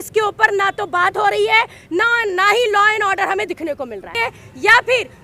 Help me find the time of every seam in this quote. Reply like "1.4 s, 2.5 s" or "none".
4.2 s